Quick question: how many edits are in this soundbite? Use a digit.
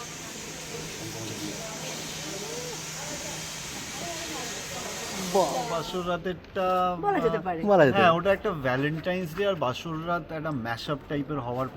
1